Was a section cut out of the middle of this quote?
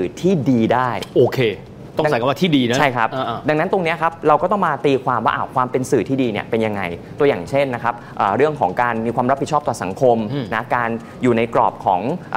no; 0 cuts

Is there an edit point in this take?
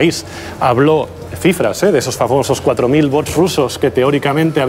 no; 0 cuts

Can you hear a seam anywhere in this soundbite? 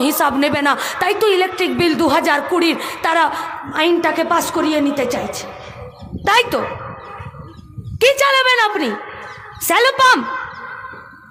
no; 0 cuts

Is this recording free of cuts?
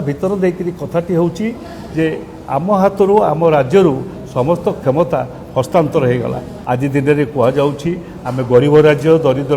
no; 1 cut; at 6.5 s

